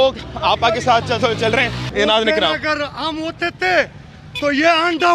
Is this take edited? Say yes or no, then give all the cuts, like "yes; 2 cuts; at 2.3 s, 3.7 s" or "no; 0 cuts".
yes; 1 cut; at 1.8 s